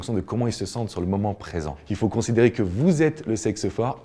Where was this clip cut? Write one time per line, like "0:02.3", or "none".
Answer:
0:01.8